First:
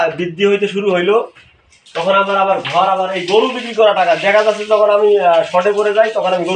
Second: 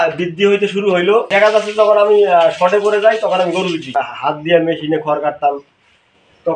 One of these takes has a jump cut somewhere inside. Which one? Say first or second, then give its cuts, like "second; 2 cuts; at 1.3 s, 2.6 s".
second; 2 cuts; at 1.3 s, 3.9 s